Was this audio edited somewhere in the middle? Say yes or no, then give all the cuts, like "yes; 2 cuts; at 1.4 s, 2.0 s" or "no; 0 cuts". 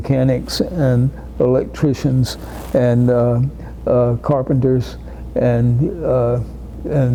no; 0 cuts